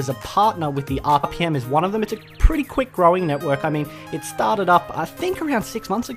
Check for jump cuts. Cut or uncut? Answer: uncut